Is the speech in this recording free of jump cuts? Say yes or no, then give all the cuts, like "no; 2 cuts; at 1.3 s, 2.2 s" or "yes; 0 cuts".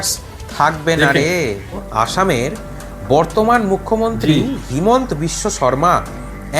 no; 1 cut; at 1.8 s